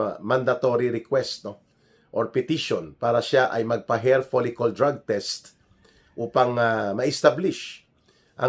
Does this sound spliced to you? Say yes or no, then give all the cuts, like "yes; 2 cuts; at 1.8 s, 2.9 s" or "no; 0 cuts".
no; 0 cuts